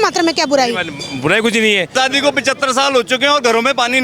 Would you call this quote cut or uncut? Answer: cut